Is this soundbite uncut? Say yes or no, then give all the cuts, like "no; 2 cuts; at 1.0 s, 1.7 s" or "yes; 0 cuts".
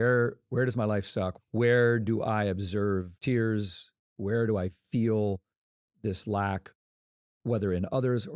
no; 2 cuts; at 1.3 s, 3.1 s